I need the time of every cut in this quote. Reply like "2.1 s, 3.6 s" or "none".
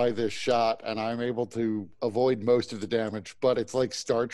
1.9 s